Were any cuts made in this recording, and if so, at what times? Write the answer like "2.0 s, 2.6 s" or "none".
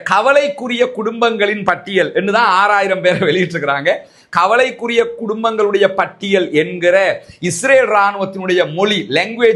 none